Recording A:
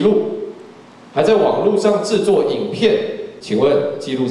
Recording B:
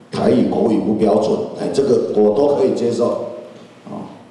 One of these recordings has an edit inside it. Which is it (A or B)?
A